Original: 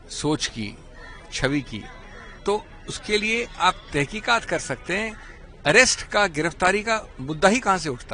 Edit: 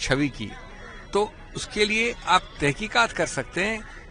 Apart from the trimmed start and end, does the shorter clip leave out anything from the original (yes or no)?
no